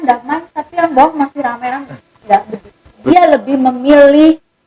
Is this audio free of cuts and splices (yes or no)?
no